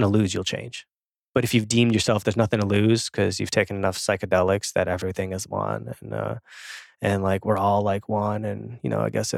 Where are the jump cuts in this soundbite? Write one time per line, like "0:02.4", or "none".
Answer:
none